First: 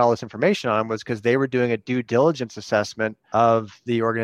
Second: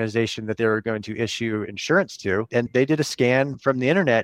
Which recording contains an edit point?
first; 1 cut; at 3.2 s

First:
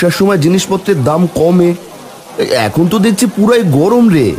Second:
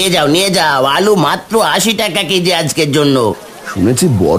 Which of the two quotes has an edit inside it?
second; 1 cut; at 3.5 s

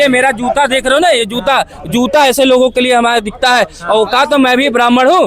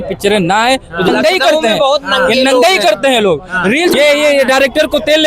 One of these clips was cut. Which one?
second; 2 cuts; at 1.1 s, 3.9 s

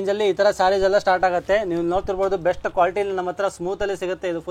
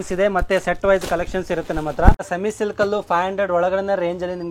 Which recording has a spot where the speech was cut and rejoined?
second; 1 cut; at 2.2 s

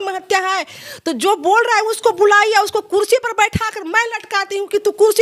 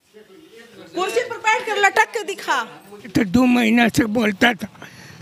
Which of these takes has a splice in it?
second; 1 cut; at 3.1 s

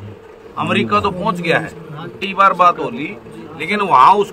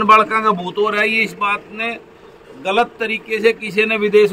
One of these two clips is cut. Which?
first; 1 cut; at 2.2 s

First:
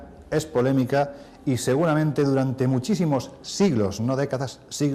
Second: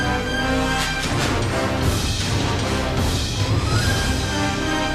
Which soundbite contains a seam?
second; 1 cut; at 3.2 s

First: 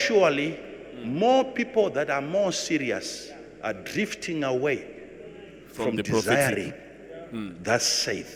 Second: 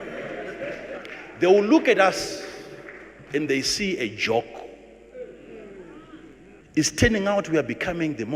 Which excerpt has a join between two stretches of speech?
second; 1 cut; at 6.6 s

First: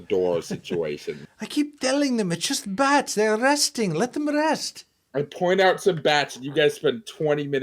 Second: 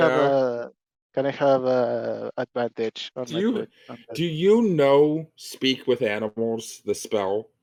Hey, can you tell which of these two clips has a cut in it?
first; 1 cut; at 1.2 s

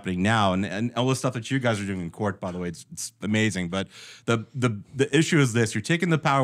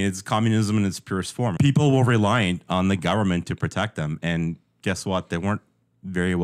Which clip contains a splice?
second; 1 cut; at 1.5 s

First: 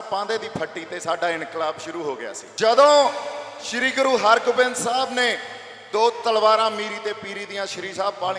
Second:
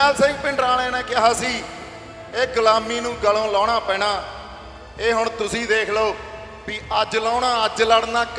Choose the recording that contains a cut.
first; 1 cut; at 2.4 s

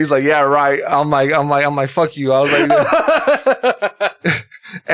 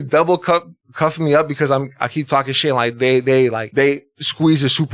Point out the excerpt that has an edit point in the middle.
second; 1 cut; at 3.6 s

